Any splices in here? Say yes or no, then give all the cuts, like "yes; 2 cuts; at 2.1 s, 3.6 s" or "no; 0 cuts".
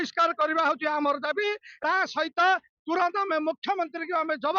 yes; 1 cut; at 1.7 s